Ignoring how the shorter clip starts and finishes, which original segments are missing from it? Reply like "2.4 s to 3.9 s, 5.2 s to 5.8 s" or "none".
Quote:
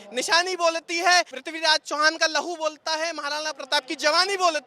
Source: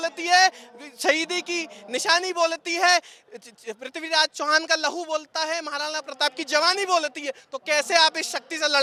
3.2 s to 3.9 s